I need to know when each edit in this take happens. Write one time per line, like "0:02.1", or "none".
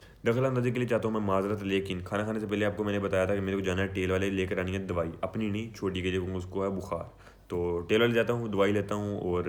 none

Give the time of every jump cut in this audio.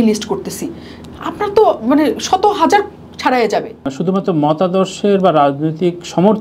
0:04.0

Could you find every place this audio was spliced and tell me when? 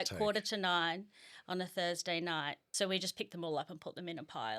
0:02.6

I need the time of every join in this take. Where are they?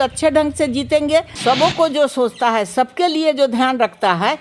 0:01.3

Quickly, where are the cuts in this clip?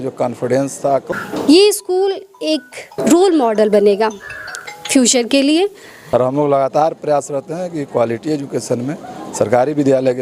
0:01.1
0:03.0
0:05.9

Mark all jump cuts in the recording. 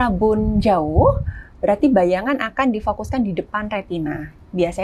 none

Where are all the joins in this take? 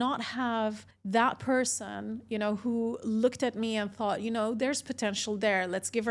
0:00.9

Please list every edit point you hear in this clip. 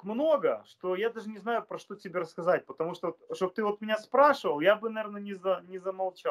none

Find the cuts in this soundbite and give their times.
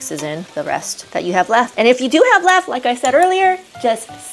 none

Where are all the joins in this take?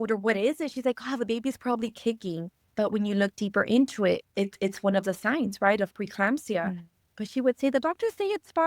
0:02.6
0:04.3
0:07.1

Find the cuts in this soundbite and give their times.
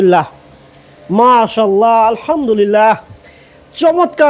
none

